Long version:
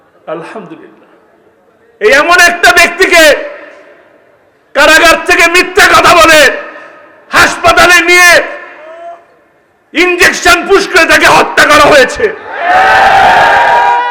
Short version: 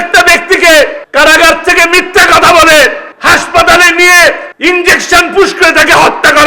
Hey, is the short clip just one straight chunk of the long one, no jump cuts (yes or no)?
no